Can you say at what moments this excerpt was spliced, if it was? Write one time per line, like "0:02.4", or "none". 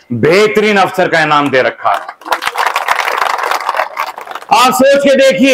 none